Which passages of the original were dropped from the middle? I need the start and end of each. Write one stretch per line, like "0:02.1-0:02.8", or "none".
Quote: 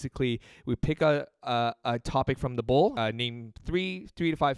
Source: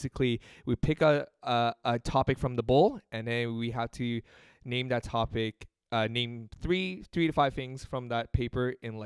0:02.9-0:05.9